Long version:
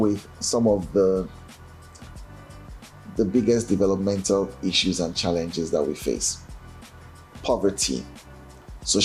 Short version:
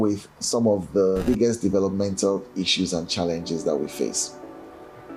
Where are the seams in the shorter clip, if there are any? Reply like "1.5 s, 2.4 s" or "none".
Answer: 1.2 s